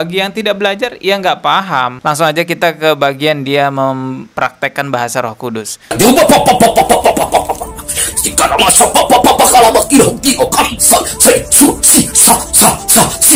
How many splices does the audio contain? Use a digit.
2